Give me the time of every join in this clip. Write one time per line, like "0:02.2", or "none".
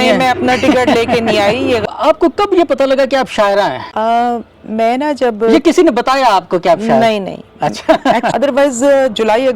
0:01.8
0:08.3